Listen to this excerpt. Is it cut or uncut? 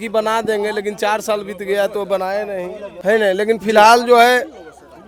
uncut